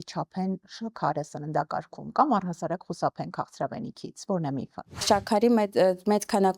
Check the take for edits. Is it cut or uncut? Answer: cut